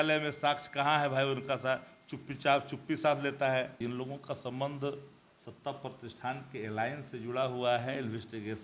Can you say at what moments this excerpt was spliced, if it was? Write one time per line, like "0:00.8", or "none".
0:03.7